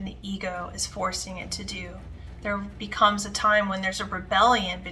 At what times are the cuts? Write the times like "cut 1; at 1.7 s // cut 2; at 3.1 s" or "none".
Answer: none